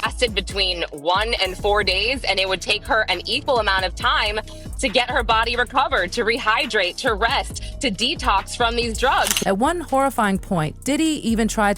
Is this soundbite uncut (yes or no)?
yes